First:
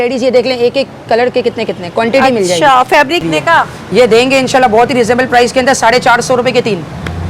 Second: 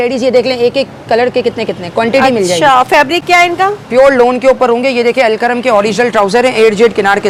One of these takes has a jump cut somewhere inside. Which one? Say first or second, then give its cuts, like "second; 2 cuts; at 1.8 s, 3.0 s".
first; 1 cut; at 3.2 s